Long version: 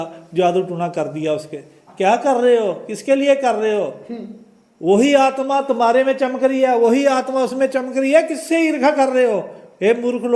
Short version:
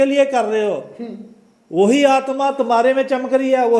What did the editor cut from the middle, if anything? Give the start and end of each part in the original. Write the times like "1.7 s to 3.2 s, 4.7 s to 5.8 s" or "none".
none